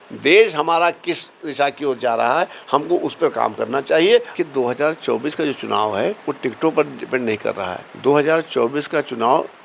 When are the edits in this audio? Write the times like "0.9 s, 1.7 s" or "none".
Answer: 4.3 s, 6.2 s, 7.8 s